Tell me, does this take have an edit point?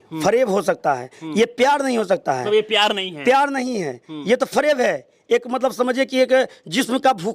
no; 0 cuts

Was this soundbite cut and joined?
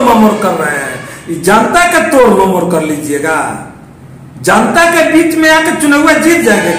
no; 0 cuts

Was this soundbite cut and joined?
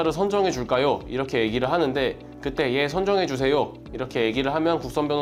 no; 0 cuts

